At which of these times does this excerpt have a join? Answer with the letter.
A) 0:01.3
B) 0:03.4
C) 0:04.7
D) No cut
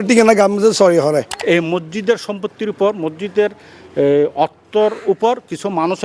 A